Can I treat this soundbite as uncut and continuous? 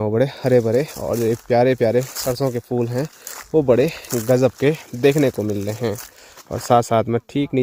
yes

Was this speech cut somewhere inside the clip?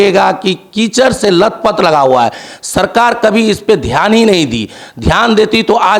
no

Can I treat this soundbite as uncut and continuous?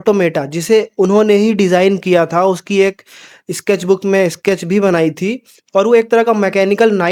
yes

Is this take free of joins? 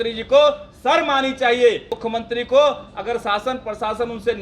no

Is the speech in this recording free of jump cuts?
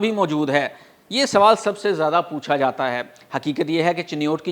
yes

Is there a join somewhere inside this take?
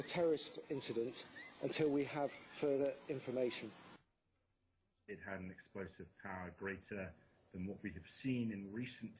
no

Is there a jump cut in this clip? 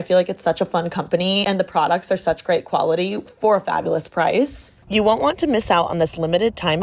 yes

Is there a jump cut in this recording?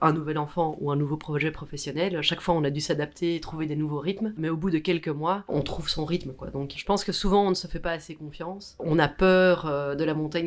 no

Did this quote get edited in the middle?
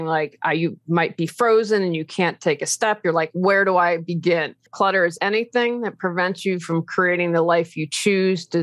yes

